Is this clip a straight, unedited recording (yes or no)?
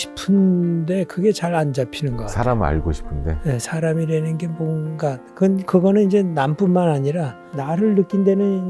yes